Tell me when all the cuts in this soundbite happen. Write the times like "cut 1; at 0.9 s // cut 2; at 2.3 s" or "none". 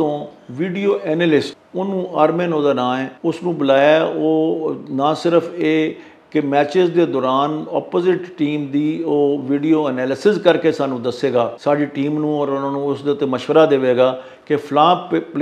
cut 1; at 1.6 s // cut 2; at 3.1 s // cut 3; at 11.6 s